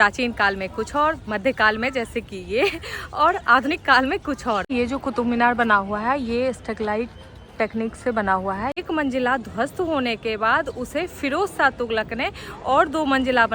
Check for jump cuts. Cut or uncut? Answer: cut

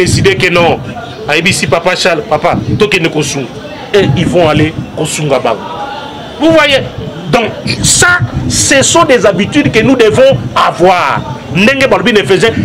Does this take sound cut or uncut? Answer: uncut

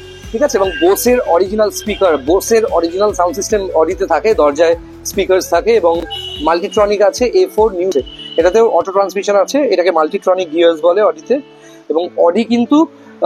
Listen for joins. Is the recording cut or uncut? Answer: uncut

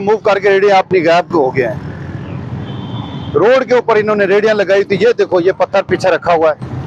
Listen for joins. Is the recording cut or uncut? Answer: uncut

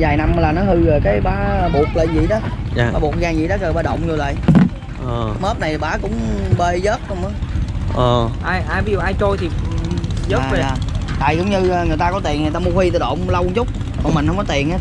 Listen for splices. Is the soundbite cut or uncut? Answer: uncut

